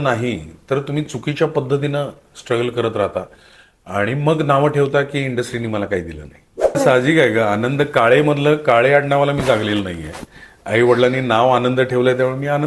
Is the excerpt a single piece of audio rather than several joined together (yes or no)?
no